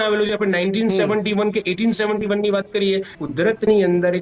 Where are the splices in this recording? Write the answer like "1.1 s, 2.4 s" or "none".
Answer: 3.2 s